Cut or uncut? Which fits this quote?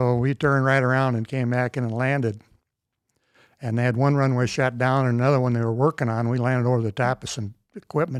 uncut